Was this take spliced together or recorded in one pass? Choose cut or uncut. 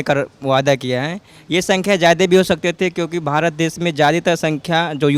uncut